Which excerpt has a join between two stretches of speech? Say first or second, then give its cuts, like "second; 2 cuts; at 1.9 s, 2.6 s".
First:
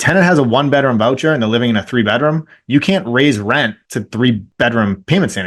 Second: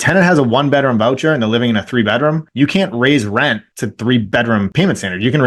second; 2 cuts; at 2.5 s, 4.5 s